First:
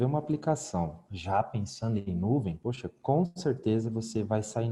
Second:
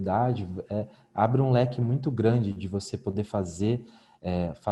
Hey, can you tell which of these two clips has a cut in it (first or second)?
first